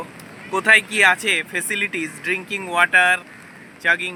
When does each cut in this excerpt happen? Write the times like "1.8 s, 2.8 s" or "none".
none